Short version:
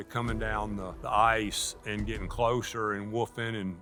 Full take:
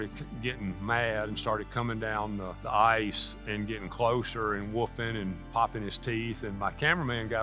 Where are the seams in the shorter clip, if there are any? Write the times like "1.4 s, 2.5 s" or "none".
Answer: none